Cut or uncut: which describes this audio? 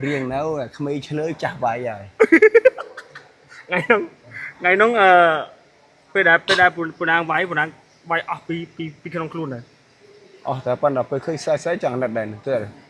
uncut